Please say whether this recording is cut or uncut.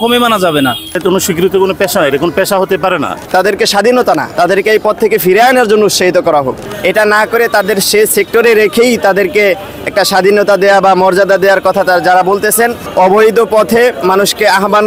cut